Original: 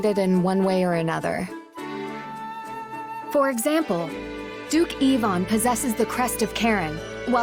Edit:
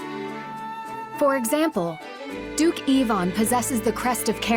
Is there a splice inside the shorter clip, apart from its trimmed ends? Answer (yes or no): yes